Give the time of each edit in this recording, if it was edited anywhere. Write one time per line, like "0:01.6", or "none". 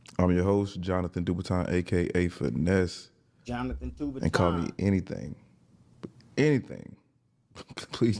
none